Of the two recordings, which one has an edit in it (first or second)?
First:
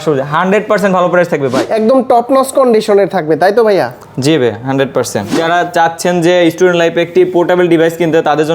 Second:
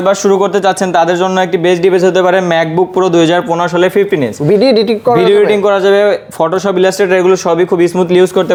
first